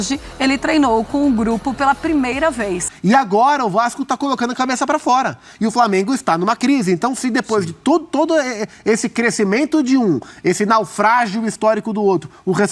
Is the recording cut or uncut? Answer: cut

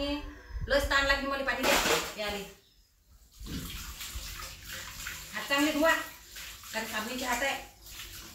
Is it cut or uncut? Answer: uncut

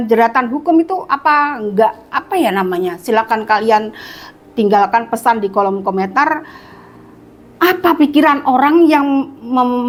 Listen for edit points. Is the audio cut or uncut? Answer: uncut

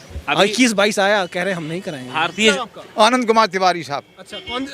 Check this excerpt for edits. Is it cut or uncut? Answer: cut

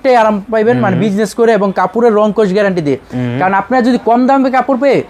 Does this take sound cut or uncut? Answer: uncut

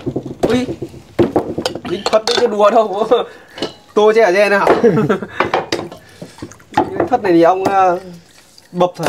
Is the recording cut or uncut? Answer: uncut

